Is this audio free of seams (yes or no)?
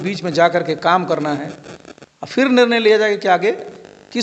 yes